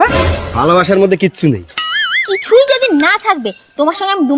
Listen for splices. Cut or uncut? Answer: uncut